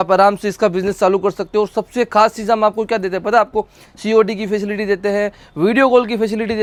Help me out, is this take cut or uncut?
uncut